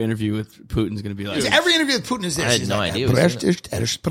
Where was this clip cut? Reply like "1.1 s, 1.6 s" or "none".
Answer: 1.4 s